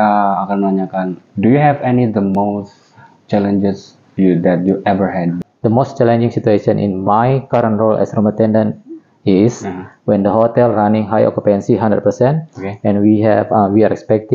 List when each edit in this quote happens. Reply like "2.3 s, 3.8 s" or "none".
5.4 s